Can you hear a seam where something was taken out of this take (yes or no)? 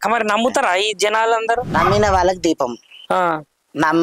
yes